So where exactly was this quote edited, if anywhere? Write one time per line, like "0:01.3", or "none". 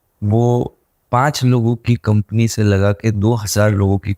none